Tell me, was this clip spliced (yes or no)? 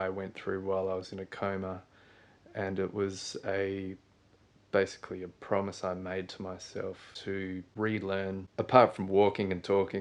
yes